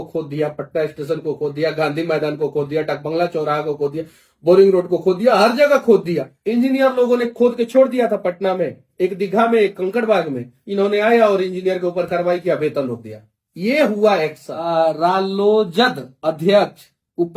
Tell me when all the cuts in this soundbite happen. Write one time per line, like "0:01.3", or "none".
0:06.3
0:14.6

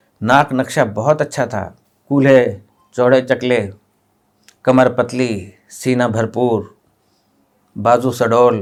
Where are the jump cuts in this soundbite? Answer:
none

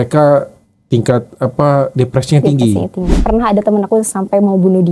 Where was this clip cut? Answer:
0:03.2

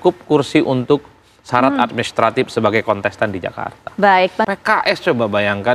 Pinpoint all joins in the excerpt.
0:04.4

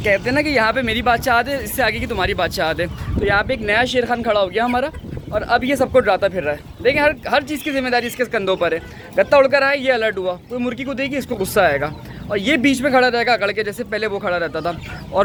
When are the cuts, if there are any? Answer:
none

